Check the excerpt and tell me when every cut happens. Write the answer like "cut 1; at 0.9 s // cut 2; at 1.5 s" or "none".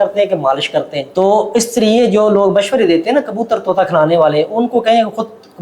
cut 1; at 1.0 s